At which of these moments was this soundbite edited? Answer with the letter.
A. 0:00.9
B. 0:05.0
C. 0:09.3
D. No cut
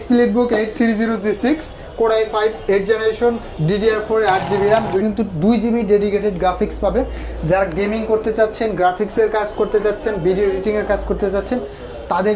B